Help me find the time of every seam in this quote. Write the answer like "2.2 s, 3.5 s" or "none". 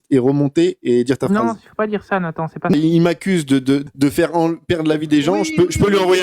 2.7 s, 3.9 s